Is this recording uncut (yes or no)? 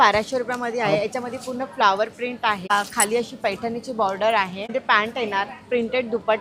no